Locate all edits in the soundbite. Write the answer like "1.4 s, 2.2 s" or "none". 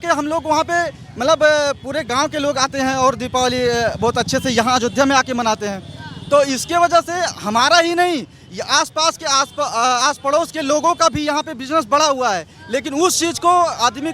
none